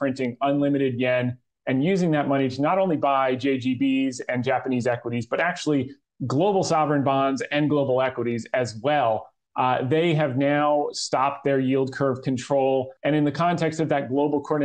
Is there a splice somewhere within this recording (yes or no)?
yes